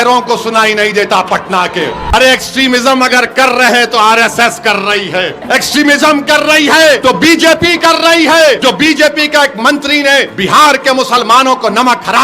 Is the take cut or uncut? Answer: cut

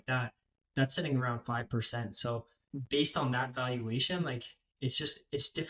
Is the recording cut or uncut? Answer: cut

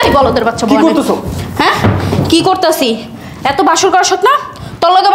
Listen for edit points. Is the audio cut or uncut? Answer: uncut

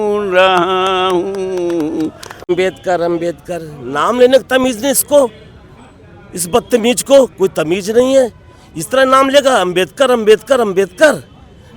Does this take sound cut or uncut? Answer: cut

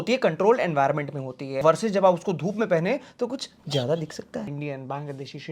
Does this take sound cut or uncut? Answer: cut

